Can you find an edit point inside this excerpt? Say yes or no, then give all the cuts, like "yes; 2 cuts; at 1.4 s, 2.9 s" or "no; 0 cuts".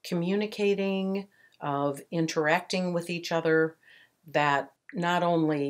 yes; 1 cut; at 4.8 s